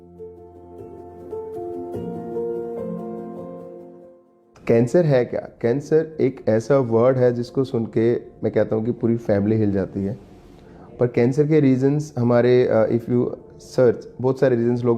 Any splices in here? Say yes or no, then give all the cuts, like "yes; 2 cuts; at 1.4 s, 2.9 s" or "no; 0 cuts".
yes; 1 cut; at 1.3 s